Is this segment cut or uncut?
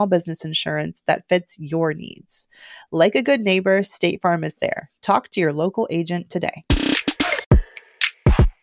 cut